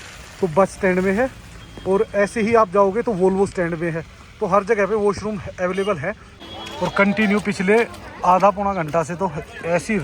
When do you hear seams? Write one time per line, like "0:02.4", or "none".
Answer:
0:06.3